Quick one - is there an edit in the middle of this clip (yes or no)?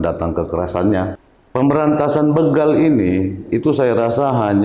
yes